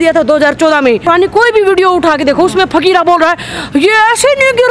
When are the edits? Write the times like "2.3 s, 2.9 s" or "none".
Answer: 1.0 s